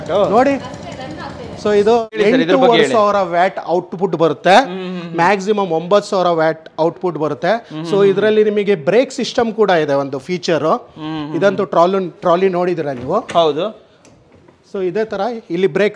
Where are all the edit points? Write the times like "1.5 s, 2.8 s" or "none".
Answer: 2.0 s

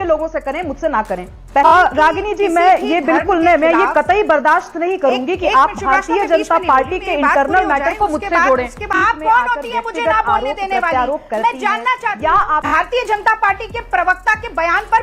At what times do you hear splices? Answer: 1.7 s, 4.8 s, 8.9 s, 12.7 s

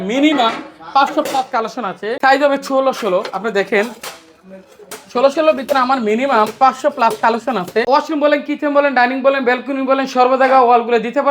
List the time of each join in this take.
2.1 s, 7.9 s

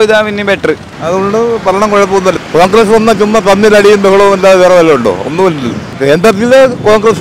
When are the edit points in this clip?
0.9 s, 2.4 s, 6.0 s

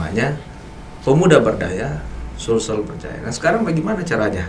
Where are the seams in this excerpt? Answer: none

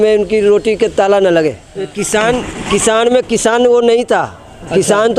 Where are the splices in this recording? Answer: 1.7 s

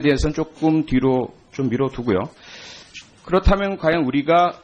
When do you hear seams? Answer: none

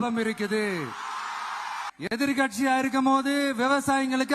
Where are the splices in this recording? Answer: 1.9 s

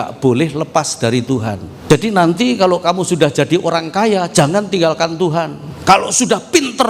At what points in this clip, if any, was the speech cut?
1.7 s

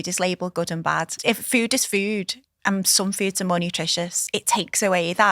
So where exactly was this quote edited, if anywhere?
1.2 s, 4.2 s

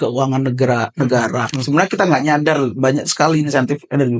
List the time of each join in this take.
1.5 s

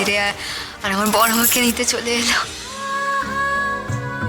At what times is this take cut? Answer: 2.7 s

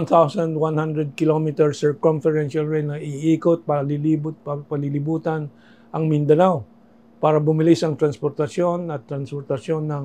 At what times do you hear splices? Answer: none

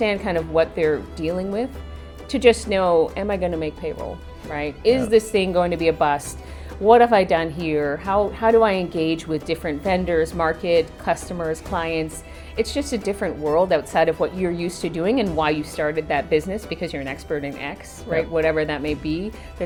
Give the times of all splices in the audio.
none

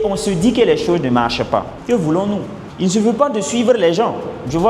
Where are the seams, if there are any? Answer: 1.7 s, 2.6 s

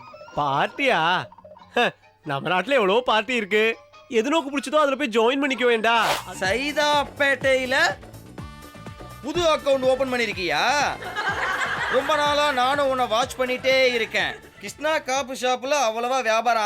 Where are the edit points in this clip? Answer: 6.2 s

